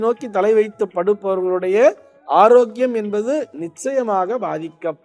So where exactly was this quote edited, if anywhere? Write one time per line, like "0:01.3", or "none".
none